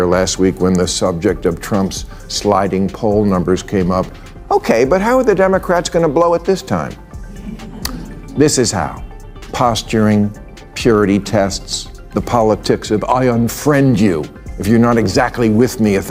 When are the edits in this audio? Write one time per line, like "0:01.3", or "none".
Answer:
none

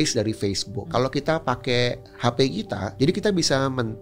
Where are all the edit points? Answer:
0:01.1
0:02.9

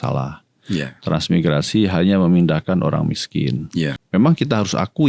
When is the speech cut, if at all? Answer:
0:04.0

